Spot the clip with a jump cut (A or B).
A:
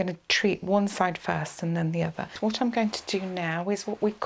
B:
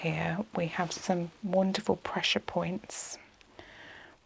A